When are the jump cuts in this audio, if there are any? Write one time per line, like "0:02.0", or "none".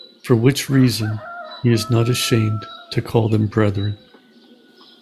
0:04.0